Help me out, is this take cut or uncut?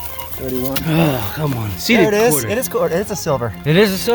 uncut